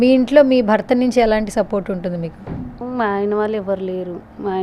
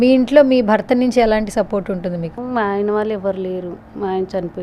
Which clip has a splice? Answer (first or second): second